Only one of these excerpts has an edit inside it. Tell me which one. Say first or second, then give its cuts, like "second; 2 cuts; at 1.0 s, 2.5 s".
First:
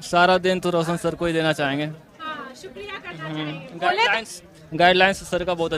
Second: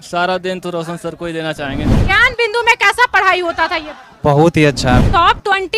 second; 2 cuts; at 1.9 s, 5.0 s